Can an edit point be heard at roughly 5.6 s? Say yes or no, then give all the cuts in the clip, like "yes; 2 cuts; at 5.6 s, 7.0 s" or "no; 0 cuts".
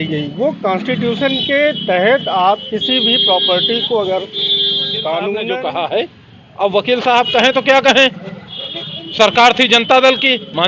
yes; 1 cut; at 5.6 s